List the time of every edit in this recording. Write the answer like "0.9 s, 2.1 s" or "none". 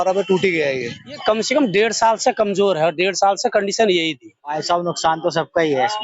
1.0 s, 4.5 s

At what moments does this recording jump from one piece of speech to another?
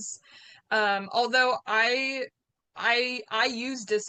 none

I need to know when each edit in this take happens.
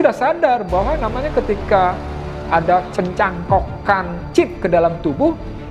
none

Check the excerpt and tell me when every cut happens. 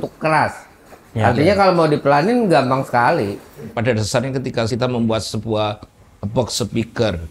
3.7 s, 4.7 s

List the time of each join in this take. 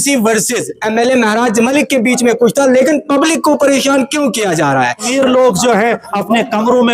5.1 s

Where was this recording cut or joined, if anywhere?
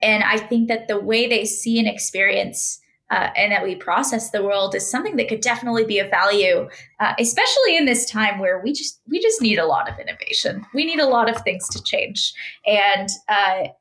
none

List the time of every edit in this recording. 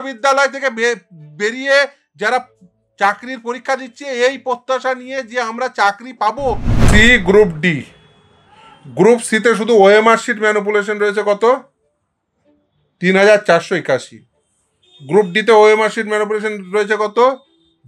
6.8 s

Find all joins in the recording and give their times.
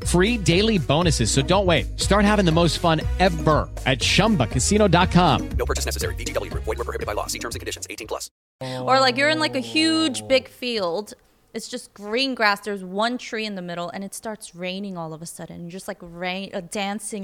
8.6 s

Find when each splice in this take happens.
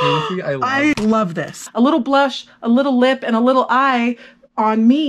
1.6 s

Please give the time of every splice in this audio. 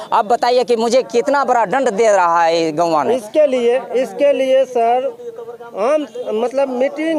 none

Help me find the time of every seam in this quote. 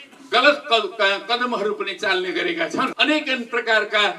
2.9 s

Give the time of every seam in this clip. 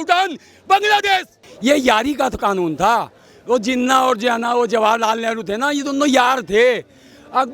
1.4 s

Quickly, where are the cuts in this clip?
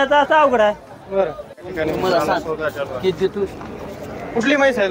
1.6 s

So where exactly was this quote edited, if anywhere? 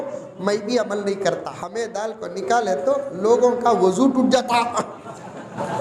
1.6 s

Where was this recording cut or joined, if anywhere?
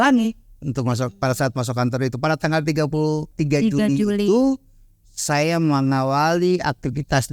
3.3 s

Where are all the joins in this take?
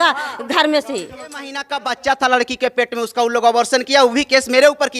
1.6 s

